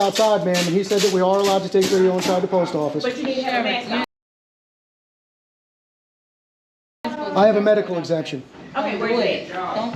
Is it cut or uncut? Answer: uncut